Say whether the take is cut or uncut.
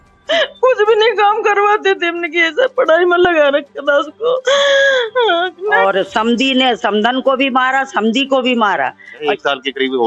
cut